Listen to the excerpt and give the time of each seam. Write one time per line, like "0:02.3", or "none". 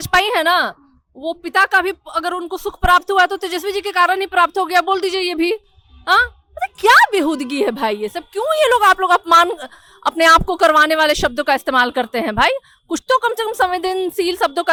none

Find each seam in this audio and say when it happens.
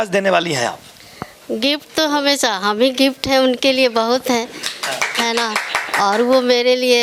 none

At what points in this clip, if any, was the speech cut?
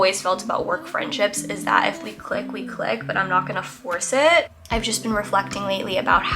0:04.6

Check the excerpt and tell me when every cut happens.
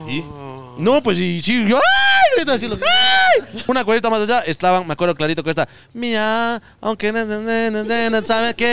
0:03.7

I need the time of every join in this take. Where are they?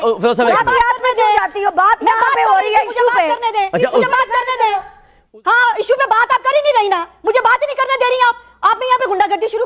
none

